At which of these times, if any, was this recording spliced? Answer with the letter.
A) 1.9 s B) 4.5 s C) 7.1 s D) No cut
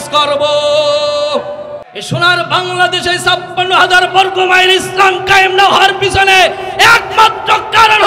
A